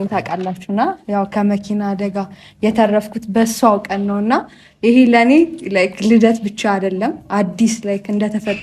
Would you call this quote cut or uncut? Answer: uncut